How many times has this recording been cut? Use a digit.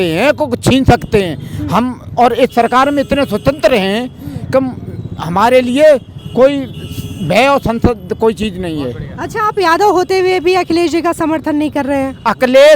0